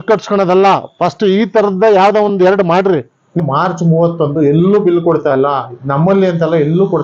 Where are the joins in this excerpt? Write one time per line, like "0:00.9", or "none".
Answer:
0:03.4